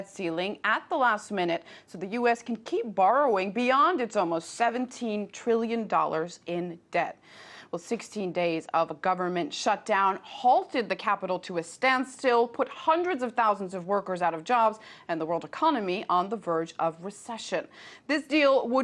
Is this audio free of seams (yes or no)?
yes